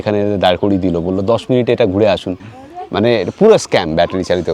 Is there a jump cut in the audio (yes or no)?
yes